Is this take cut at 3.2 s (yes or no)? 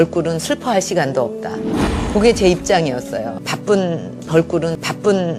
no